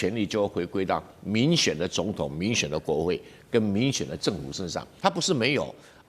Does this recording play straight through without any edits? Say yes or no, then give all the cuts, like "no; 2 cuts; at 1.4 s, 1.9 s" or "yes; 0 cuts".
no; 1 cut; at 4.9 s